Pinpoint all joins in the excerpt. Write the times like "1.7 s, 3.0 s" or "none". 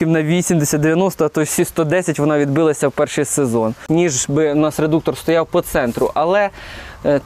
3.8 s